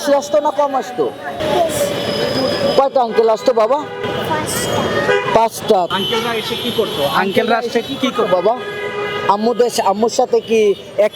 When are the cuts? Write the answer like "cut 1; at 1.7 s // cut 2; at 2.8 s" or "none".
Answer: cut 1; at 1.4 s // cut 2; at 4.0 s // cut 3; at 5.9 s